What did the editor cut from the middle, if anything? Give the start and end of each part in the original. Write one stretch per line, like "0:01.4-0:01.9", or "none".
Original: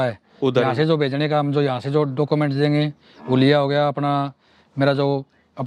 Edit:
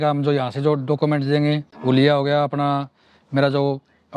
0:03.0-0:03.1